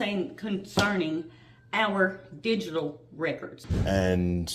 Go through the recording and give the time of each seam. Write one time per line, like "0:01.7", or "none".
0:03.5